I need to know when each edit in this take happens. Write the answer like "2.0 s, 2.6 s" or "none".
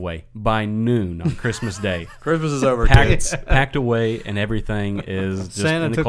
none

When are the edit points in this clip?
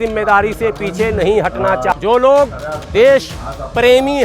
1.9 s

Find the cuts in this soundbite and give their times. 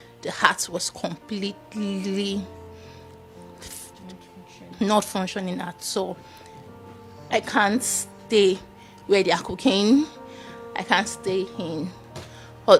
none

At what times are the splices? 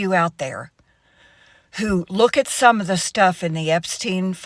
none

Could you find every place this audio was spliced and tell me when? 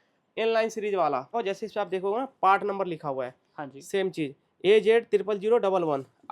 1.3 s

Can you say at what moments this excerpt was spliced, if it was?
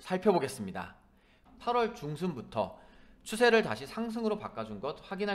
1.4 s

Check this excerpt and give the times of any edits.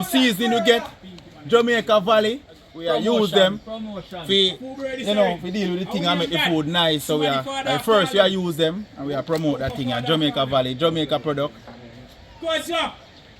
2.7 s

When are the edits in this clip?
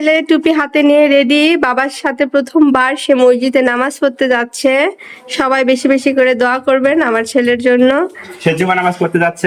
none

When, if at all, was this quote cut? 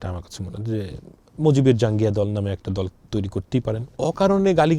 3.8 s

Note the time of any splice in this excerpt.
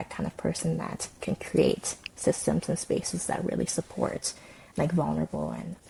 none

